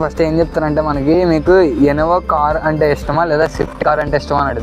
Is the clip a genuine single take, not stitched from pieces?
yes; 0 cuts

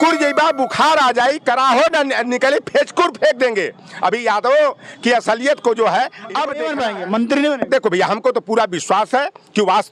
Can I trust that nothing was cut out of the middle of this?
no; 1 cut; at 6.5 s

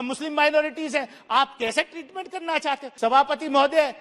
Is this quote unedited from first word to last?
no; 1 cut; at 2.9 s

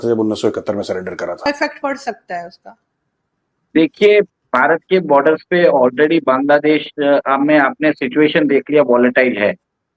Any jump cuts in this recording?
yes; 1 cut; at 1.5 s

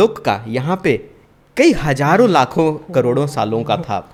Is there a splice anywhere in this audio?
no; 0 cuts

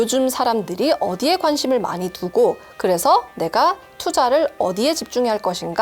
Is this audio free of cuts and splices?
yes; 0 cuts

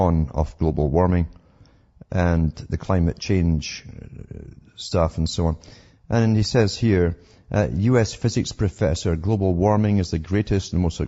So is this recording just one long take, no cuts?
yes; 0 cuts

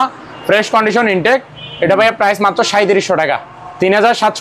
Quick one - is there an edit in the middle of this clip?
no; 0 cuts

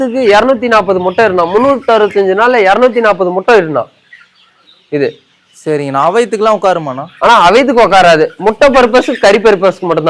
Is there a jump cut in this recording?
no; 0 cuts

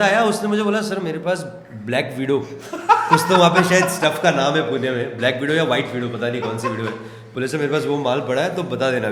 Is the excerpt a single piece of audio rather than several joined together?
yes; 0 cuts

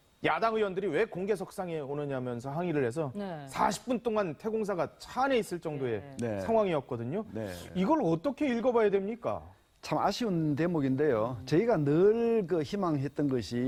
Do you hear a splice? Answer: no; 0 cuts

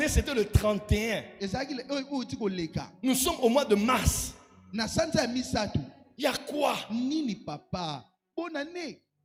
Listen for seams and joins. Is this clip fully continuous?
yes; 0 cuts

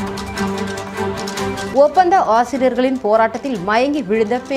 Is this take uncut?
yes; 0 cuts

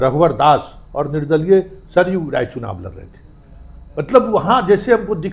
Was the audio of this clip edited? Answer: no; 0 cuts

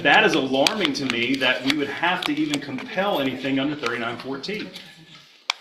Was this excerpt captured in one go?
yes; 0 cuts

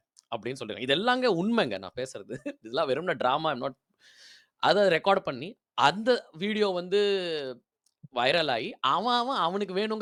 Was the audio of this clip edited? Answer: no; 0 cuts

